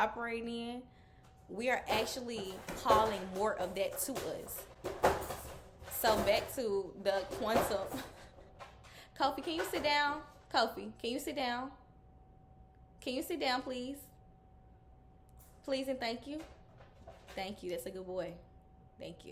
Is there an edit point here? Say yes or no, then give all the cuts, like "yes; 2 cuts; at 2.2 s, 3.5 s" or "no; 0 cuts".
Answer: no; 0 cuts